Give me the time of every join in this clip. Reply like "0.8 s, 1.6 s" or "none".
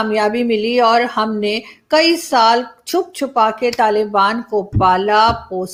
none